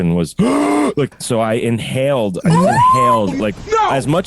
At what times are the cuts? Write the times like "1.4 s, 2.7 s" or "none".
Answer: 1.2 s, 3.4 s